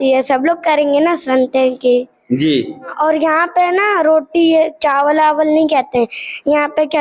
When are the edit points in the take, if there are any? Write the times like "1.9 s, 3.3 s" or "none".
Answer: 2.9 s